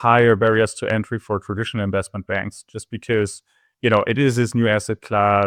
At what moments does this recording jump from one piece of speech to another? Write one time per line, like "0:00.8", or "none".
none